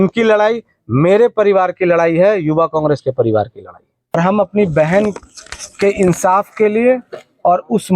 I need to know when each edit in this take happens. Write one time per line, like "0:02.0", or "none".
0:04.1